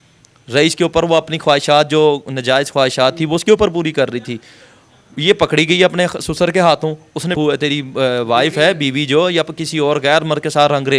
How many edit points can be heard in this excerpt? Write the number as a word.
one